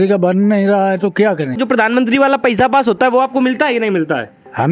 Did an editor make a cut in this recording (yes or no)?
yes